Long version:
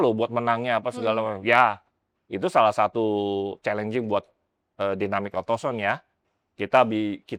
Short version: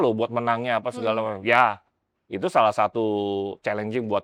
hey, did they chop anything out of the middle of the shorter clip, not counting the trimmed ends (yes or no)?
no